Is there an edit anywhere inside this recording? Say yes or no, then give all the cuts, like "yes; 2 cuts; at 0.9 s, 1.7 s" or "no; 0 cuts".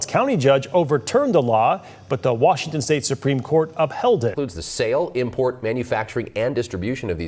no; 0 cuts